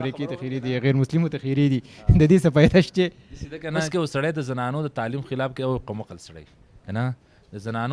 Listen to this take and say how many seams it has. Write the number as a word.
one